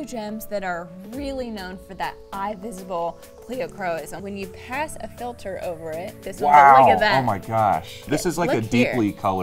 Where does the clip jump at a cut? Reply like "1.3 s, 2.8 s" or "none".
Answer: 4.1 s, 8.0 s